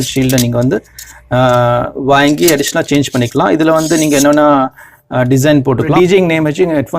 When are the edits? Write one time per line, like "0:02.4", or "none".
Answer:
0:05.9